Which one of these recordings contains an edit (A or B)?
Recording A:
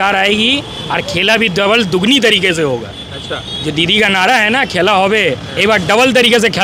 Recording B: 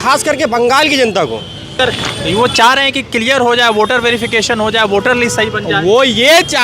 B